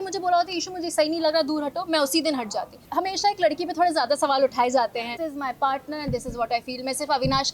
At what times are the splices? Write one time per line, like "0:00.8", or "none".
0:02.8
0:05.2